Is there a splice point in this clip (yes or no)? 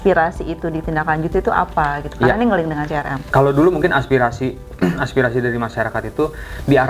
yes